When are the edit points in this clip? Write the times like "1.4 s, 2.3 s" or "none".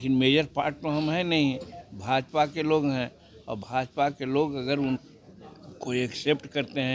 none

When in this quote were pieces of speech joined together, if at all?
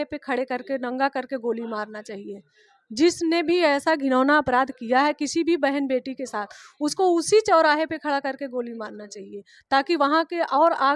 none

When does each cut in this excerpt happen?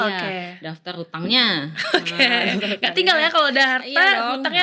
none

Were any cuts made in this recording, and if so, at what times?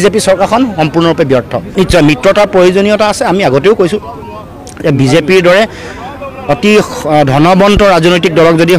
none

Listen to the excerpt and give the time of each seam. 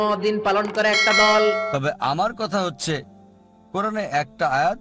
1.7 s

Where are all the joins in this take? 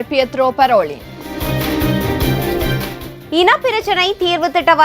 1.3 s, 2.9 s

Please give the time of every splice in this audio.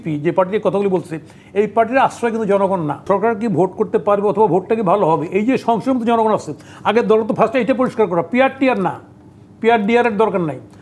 3.0 s

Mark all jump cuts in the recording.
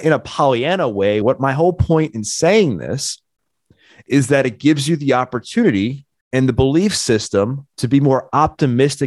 1.2 s

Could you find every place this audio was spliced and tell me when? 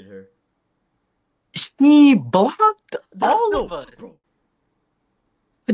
3.9 s

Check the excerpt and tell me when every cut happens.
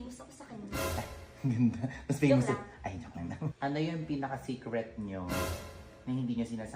3.4 s

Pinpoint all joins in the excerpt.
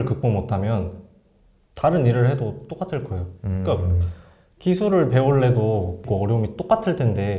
6.0 s

